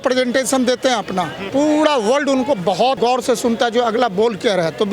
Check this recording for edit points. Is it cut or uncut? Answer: cut